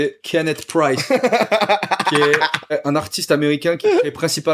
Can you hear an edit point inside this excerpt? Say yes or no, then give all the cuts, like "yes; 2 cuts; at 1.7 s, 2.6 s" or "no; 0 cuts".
yes; 1 cut; at 2.7 s